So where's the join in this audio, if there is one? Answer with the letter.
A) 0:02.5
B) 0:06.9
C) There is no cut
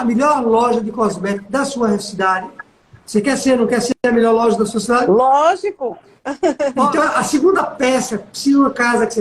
B